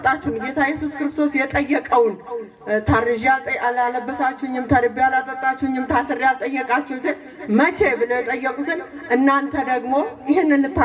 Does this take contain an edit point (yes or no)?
no